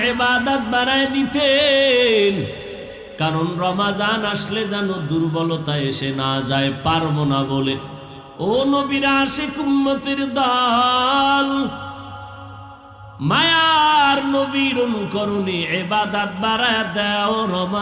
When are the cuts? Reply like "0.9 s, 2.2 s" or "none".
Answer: none